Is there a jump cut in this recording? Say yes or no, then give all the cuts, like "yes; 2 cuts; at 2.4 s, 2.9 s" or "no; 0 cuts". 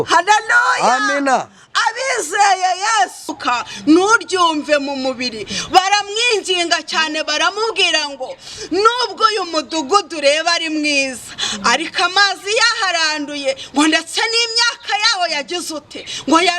yes; 1 cut; at 3.4 s